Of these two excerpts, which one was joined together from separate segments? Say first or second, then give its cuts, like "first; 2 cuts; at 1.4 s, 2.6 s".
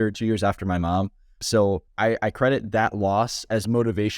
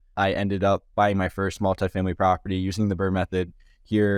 first; 1 cut; at 1.9 s